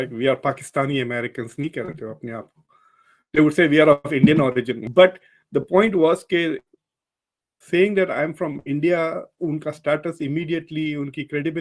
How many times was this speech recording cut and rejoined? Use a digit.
1